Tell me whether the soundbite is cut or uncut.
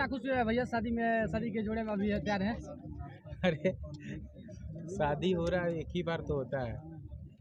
uncut